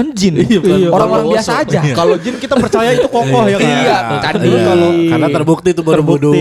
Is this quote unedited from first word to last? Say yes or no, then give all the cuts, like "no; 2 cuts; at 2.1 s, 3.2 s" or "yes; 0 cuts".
yes; 0 cuts